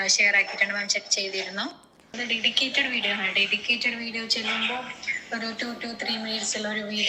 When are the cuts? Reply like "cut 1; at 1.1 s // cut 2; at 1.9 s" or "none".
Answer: cut 1; at 2.2 s